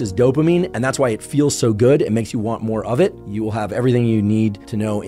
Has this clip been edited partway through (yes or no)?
no